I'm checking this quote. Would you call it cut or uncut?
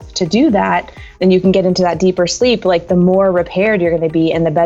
cut